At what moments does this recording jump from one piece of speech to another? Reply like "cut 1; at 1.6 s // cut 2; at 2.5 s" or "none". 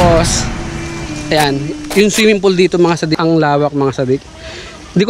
cut 1; at 3.1 s